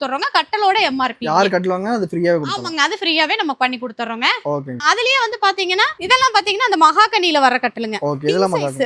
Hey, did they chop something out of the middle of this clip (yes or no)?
no